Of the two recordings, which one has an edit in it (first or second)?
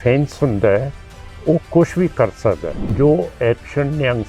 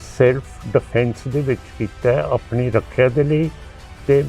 first